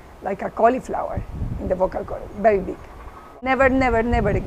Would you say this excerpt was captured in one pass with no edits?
no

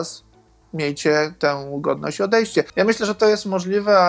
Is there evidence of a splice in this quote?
yes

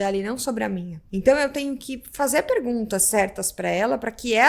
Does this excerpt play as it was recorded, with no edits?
no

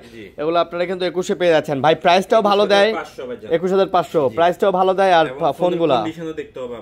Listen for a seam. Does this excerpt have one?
no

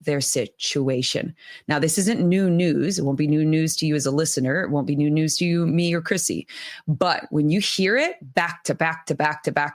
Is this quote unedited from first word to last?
yes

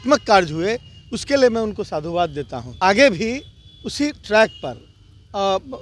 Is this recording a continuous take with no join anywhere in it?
no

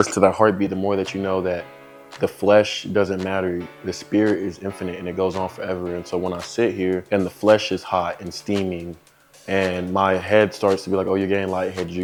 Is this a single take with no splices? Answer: yes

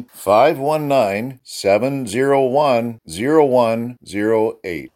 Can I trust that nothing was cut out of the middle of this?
yes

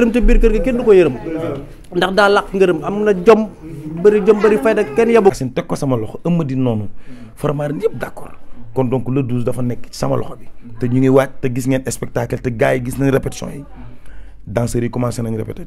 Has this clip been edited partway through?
yes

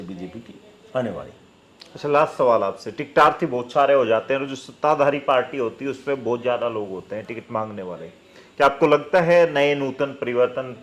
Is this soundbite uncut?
yes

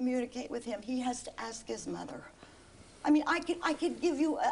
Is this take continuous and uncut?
no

